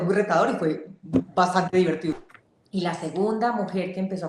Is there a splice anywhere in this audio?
yes; 1 cut; at 2.1 s

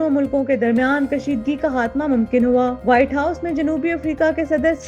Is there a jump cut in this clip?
no; 0 cuts

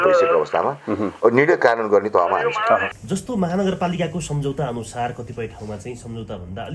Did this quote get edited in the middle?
yes; 1 cut; at 2.9 s

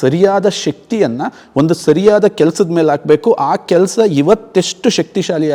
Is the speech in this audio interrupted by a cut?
no; 0 cuts

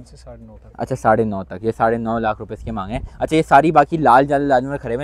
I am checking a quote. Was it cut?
no; 0 cuts

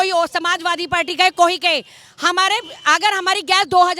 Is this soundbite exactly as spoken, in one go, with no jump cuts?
yes; 0 cuts

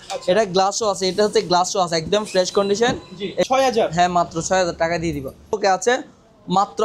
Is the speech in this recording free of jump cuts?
no; 2 cuts; at 3.5 s, 5.6 s

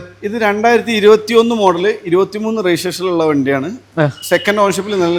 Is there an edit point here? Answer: no; 0 cuts

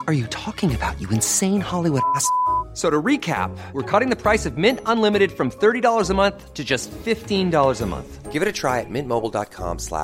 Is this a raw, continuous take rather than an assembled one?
yes; 0 cuts

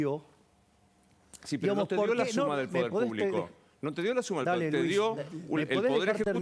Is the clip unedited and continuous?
yes; 0 cuts

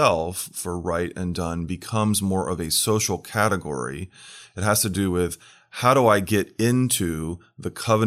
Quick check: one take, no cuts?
yes; 0 cuts

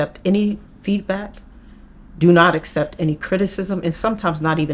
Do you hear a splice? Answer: no; 0 cuts

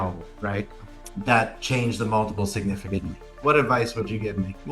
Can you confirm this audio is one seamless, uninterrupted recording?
no; 1 cut; at 3.3 s

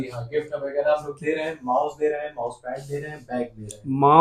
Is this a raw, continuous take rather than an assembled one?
yes; 0 cuts

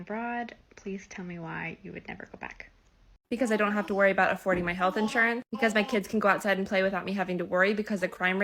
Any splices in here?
no; 0 cuts

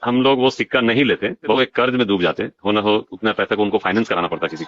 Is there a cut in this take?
yes; 1 cut; at 1.5 s

